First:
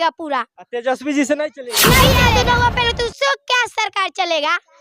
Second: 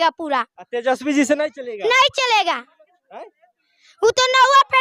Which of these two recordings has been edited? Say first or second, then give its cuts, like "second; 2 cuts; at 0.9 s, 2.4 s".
first; 1 cut; at 2.1 s